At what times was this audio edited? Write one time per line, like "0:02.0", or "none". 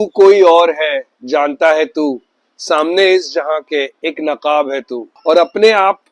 0:05.0